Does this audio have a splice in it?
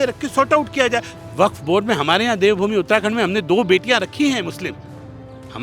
yes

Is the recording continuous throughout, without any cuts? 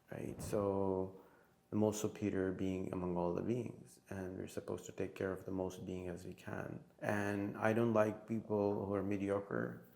no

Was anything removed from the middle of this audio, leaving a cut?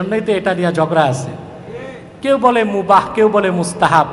no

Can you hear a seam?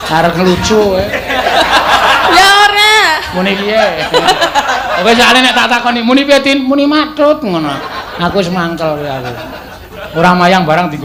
no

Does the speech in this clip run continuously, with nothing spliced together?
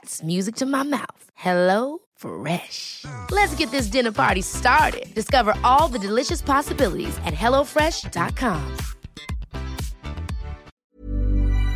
no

